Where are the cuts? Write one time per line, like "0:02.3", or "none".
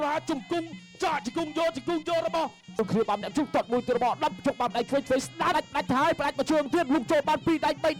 0:02.8
0:05.5